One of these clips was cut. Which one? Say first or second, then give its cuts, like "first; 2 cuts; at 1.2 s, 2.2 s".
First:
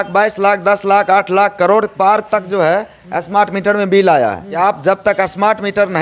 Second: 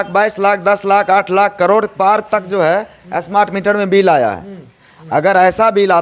first; 1 cut; at 4.5 s